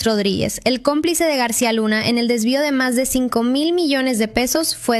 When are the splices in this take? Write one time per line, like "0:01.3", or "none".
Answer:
0:02.3

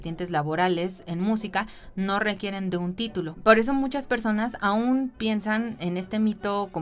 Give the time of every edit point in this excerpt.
0:03.3

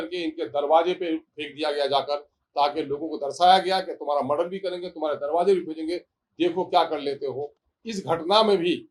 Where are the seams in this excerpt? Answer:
none

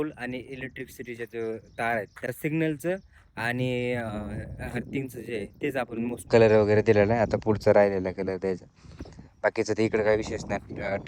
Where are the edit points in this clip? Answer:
0:02.2
0:06.3

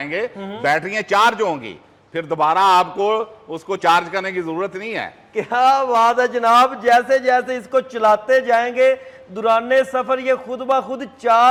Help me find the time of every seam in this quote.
none

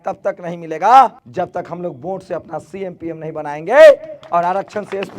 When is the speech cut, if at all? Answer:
0:01.2

